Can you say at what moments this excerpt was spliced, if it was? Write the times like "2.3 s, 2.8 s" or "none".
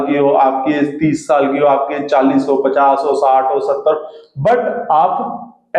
none